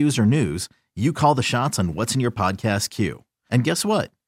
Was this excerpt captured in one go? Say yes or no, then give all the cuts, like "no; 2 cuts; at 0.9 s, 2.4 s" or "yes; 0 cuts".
yes; 0 cuts